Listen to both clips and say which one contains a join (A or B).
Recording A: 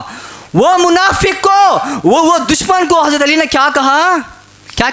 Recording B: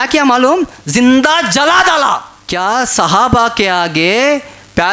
B